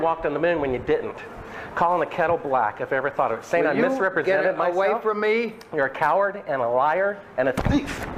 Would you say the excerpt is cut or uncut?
uncut